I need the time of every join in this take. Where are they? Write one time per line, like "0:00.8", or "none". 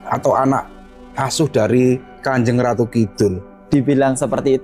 0:03.5

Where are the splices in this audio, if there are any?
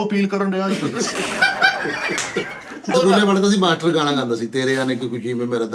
0:02.9

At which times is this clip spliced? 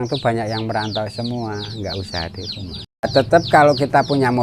0:03.1

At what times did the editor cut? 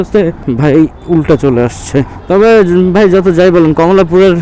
0:02.2

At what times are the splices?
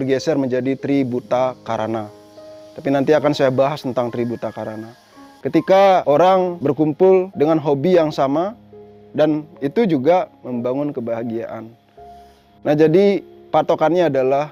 0:05.3

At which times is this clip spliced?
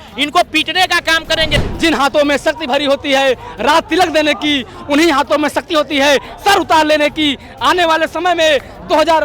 0:01.6

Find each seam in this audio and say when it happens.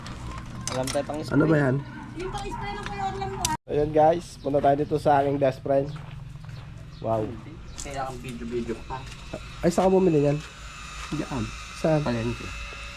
0:03.6

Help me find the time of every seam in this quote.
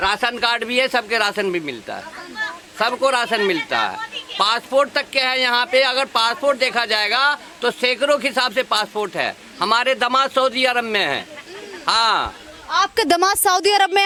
none

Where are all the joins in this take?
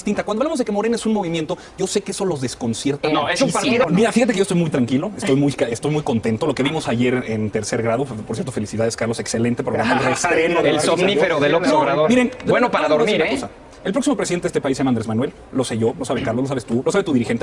0:03.9

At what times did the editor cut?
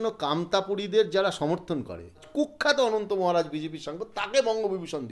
0:02.3

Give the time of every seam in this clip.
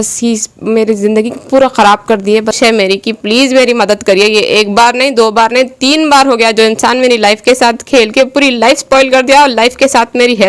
0:02.6

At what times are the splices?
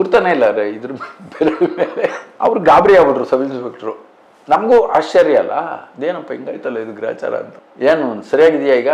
none

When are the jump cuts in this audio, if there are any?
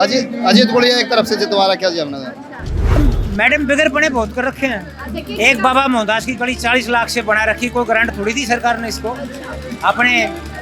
0:03.0

